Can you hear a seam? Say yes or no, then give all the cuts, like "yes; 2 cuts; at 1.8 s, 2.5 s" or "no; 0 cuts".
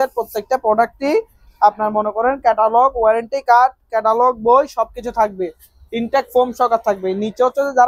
no; 0 cuts